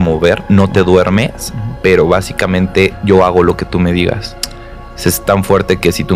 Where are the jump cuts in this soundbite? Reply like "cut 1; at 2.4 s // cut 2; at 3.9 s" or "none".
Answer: none